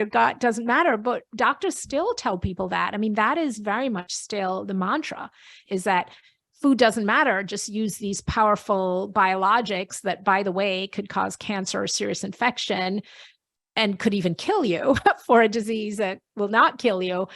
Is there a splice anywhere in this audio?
yes; 1 cut; at 5.6 s

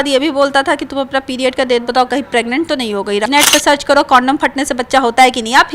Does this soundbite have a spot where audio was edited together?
yes; 1 cut; at 3.3 s

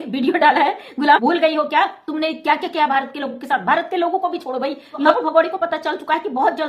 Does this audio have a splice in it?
yes; 2 cuts; at 1.2 s, 5.1 s

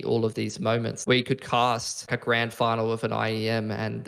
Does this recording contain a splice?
yes; 2 cuts; at 0.9 s, 2.1 s

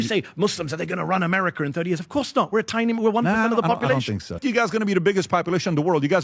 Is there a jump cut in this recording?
yes; 1 cut; at 4.4 s

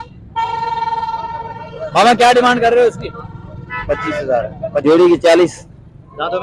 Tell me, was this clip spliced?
yes; 1 cut; at 4.8 s

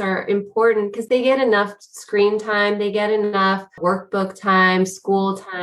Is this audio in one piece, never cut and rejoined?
no; 2 cuts; at 1.0 s, 3.8 s

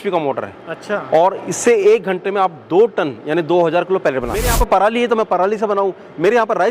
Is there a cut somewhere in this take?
yes; 1 cut; at 4.5 s

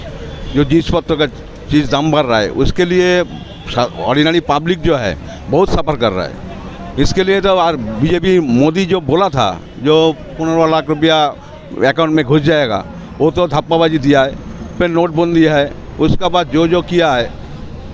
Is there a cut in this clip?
no; 0 cuts

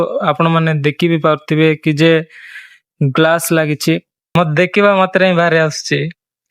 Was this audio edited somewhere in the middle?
yes; 1 cut; at 4.1 s

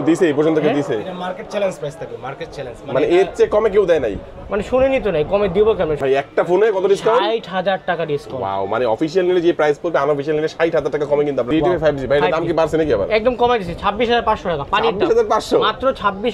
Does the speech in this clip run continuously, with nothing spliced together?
no; 2 cuts; at 6.0 s, 11.5 s

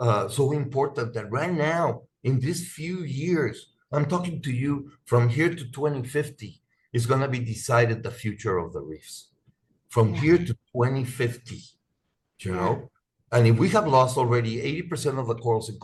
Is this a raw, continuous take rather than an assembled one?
yes; 0 cuts

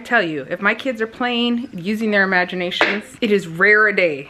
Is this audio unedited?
no; 1 cut; at 3.1 s

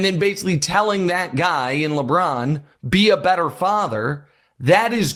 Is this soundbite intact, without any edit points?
yes; 0 cuts

